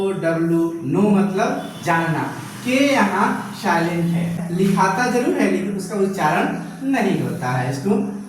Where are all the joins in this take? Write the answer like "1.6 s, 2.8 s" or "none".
4.4 s